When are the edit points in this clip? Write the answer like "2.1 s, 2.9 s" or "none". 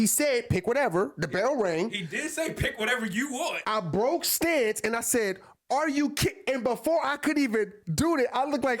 3.6 s